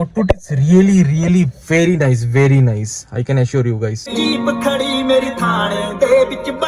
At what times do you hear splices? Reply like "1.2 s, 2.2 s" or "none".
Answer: 4.0 s